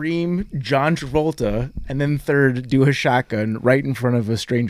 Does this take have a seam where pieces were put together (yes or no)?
no